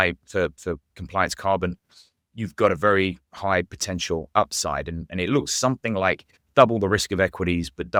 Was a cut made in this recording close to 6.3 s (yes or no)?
no